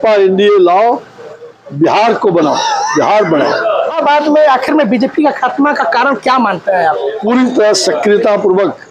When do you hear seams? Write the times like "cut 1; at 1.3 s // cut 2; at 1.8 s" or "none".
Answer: cut 1; at 3.9 s // cut 2; at 7.2 s